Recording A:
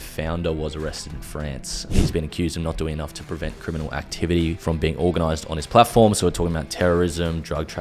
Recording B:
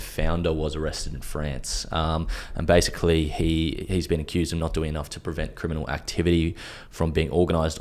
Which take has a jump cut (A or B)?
A